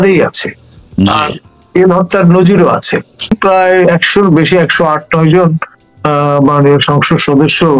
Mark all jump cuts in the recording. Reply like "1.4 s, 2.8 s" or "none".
3.3 s